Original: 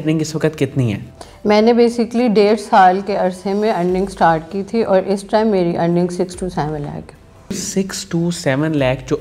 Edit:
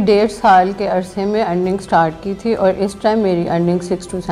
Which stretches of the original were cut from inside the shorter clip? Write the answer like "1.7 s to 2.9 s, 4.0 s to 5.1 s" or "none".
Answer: none